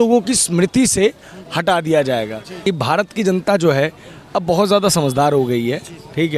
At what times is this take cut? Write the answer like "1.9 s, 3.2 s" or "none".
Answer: 2.5 s